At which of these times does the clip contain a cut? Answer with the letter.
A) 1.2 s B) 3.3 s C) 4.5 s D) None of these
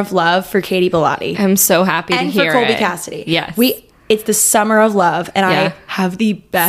D